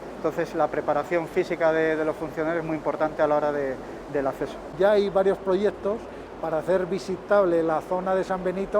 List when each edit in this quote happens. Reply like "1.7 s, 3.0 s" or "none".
4.7 s